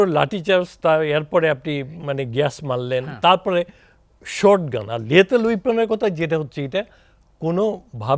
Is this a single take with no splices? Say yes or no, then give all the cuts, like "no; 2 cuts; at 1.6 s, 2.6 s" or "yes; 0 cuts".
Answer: yes; 0 cuts